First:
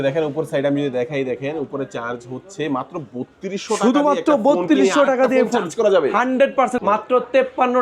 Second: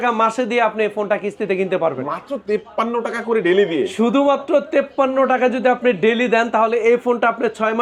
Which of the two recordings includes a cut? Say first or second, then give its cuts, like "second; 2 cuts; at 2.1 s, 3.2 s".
first; 1 cut; at 6.8 s